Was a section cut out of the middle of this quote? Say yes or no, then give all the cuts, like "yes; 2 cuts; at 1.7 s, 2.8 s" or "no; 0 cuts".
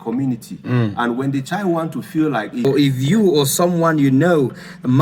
yes; 1 cut; at 2.6 s